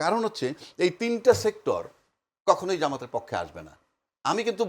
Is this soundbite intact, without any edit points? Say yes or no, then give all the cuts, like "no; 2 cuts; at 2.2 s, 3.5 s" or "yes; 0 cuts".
yes; 0 cuts